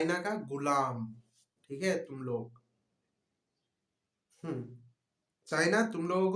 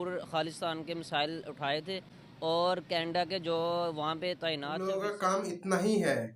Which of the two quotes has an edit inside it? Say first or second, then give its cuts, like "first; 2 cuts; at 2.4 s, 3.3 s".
second; 1 cut; at 4.8 s